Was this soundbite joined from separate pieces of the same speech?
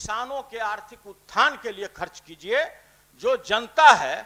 no; 0 cuts

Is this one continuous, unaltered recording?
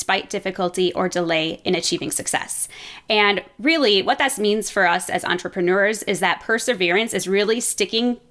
yes; 0 cuts

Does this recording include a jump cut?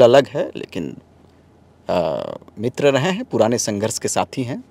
no; 0 cuts

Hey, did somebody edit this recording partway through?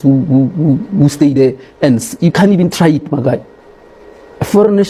no; 0 cuts

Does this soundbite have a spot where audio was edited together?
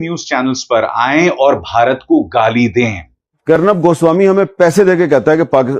yes; 1 cut; at 3.6 s

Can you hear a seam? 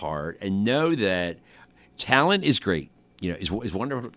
yes; 1 cut; at 1.7 s

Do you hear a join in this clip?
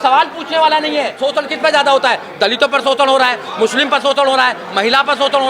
yes; 1 cut; at 1.2 s

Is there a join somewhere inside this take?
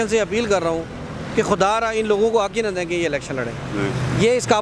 no; 0 cuts

